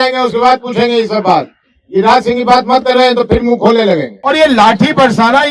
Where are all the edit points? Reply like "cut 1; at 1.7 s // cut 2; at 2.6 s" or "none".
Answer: cut 1; at 4.1 s